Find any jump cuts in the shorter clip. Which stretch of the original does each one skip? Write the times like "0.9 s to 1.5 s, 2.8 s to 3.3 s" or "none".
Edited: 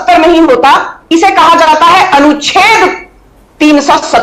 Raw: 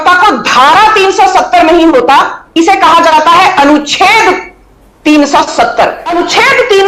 none